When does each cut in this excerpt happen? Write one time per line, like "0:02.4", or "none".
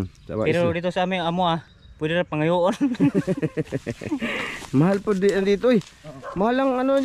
none